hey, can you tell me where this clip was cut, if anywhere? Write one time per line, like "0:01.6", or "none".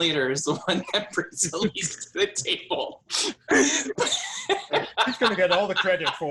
none

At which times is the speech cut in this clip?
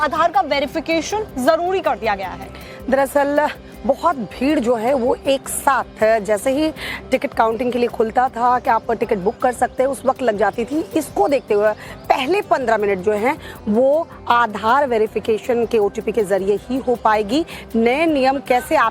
0:01.8

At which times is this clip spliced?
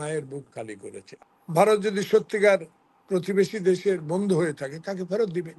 0:01.1

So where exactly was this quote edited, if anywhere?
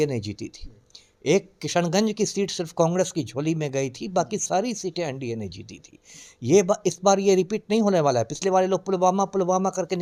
none

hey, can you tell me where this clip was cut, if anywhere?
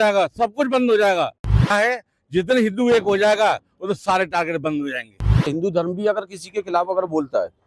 0:01.7
0:05.5

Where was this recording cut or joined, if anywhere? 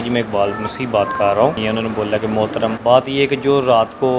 0:01.6
0:02.8

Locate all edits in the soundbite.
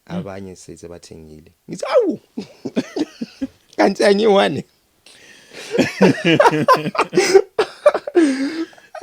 none

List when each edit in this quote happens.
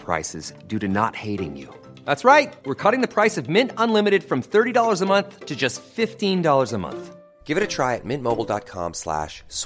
none

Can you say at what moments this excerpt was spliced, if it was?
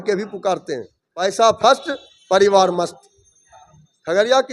0:01.0

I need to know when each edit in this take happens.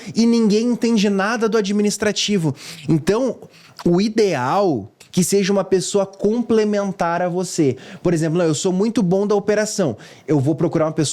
0:04.9

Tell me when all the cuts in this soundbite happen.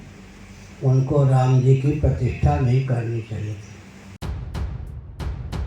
0:04.1

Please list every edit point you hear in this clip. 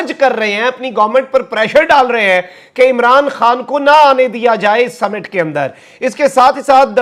none

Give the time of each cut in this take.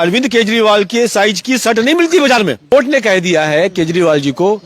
0:02.7

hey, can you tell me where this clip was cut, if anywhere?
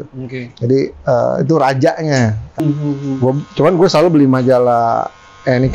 0:02.6

